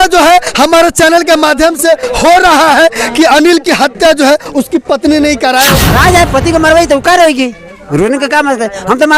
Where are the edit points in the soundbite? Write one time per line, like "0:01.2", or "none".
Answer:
0:05.8